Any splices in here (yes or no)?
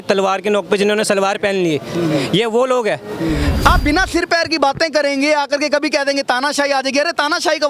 yes